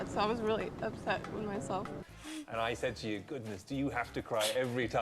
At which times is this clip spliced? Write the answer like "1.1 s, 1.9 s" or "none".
2.1 s